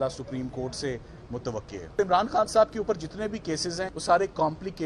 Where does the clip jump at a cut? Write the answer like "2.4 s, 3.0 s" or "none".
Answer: 2.0 s, 3.9 s